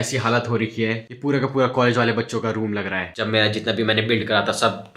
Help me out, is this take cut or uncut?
cut